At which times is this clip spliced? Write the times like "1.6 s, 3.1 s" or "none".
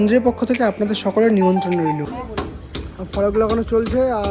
2.2 s